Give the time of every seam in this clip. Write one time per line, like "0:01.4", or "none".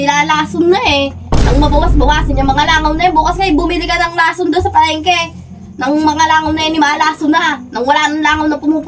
none